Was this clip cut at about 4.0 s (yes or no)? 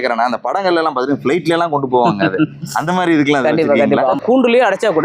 yes